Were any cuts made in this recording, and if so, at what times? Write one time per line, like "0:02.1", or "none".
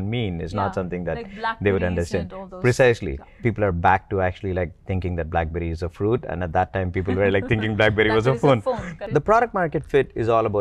0:08.9